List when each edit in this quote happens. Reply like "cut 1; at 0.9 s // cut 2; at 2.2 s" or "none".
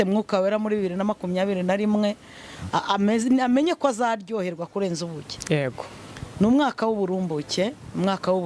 none